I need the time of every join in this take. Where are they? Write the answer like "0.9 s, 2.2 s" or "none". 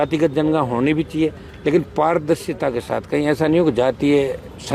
none